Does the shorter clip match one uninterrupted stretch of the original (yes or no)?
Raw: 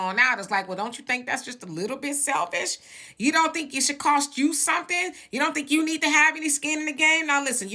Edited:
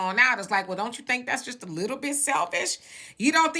yes